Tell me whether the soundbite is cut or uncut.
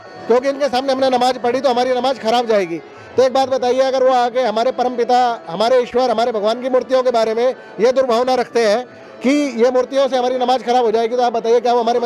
uncut